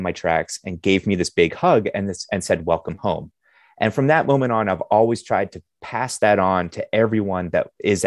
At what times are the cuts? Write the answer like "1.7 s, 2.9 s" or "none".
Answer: none